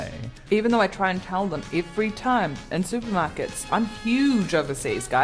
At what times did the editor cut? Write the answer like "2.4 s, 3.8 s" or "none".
3.7 s